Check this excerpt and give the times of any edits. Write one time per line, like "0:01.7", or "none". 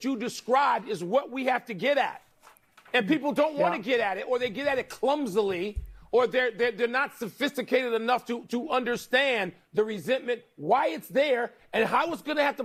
none

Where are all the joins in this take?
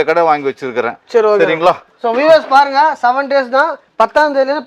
none

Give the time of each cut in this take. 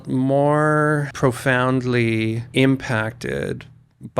0:01.1
0:02.4

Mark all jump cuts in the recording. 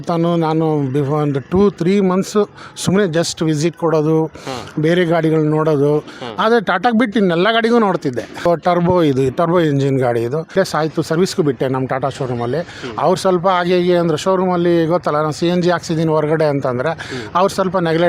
0:08.5
0:10.5

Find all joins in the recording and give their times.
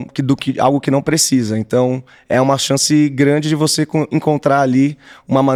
none

